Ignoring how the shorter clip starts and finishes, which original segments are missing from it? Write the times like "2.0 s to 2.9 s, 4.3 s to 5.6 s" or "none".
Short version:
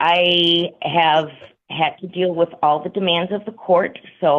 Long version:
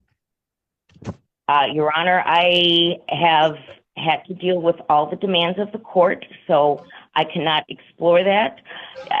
none